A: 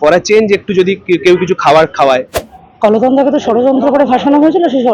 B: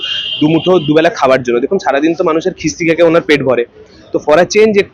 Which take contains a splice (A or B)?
A